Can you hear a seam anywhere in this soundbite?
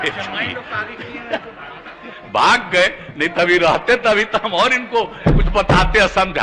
no; 0 cuts

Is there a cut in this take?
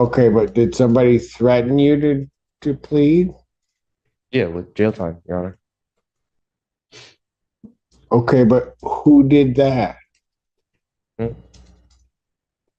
no; 0 cuts

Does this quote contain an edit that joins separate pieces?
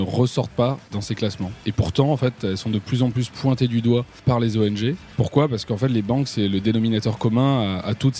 yes; 3 cuts; at 0.9 s, 4.2 s, 5.1 s

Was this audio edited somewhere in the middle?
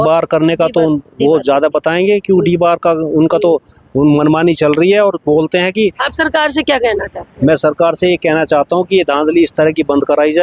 no; 0 cuts

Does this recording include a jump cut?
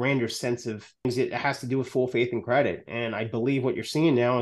yes; 1 cut; at 1.0 s

